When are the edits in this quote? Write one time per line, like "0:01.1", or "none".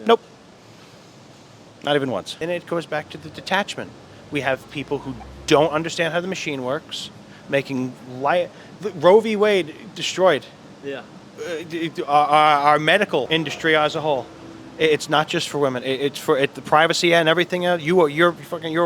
0:02.4
0:13.3